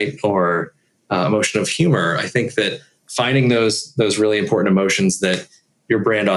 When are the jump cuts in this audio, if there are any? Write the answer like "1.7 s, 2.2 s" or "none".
none

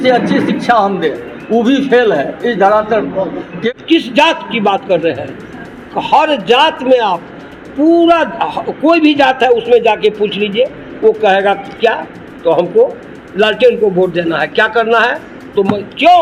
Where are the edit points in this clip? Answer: 3.6 s

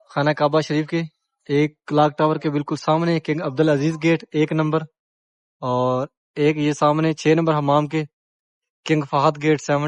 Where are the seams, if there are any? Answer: none

